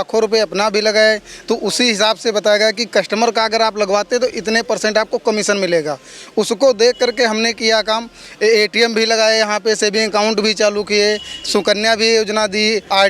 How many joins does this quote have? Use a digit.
0